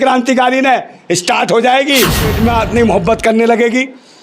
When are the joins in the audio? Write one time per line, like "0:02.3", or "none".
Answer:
0:02.3